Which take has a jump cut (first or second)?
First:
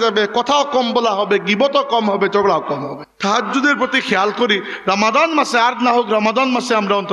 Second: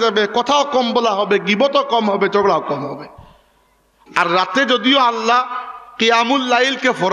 first